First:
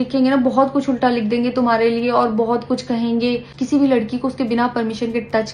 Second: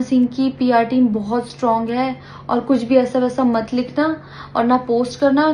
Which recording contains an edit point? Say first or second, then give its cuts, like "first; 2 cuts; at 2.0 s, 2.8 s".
first; 1 cut; at 3.5 s